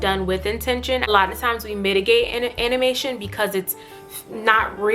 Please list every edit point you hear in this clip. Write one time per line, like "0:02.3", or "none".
0:01.1